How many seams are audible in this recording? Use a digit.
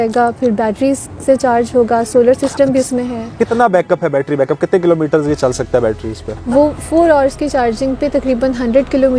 2